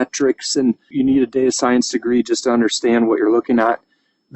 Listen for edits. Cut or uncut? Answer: cut